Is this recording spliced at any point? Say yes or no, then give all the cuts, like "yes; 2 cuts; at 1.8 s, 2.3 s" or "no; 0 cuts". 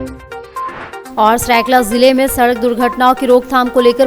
yes; 1 cut; at 1.0 s